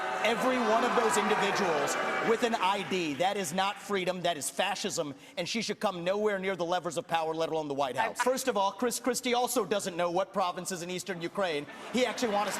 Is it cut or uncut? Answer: cut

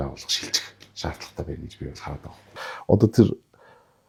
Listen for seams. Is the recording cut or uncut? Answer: uncut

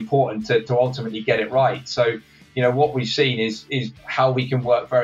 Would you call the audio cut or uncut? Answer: uncut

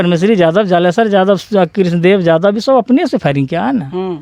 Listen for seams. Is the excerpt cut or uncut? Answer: uncut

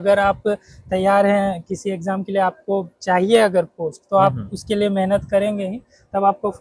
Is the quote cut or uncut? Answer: uncut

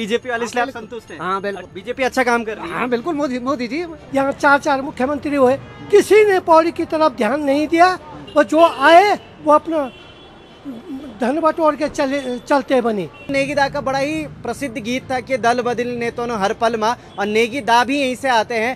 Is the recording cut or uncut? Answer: cut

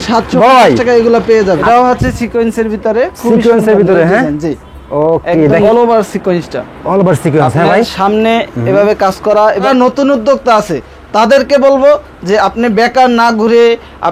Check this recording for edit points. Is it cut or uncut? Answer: cut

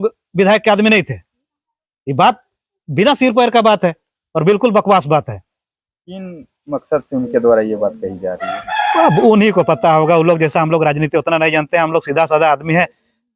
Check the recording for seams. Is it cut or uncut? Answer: uncut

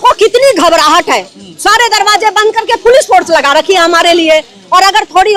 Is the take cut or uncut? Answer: uncut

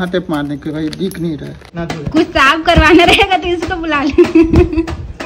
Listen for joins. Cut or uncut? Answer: cut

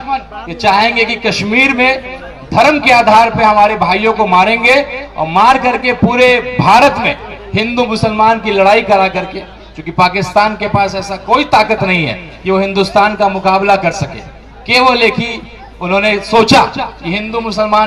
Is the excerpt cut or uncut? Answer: uncut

